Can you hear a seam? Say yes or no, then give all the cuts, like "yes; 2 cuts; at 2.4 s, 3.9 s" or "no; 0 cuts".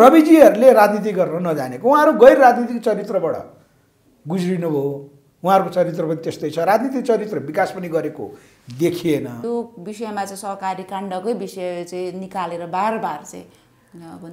yes; 1 cut; at 9.4 s